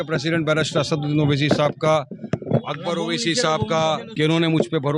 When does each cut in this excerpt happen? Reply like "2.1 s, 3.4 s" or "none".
4.1 s